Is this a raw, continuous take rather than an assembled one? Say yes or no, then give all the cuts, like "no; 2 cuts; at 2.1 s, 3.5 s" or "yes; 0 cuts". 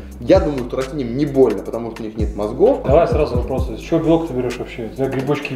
no; 1 cut; at 2.8 s